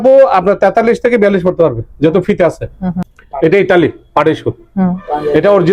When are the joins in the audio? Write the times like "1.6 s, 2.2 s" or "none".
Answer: 3.1 s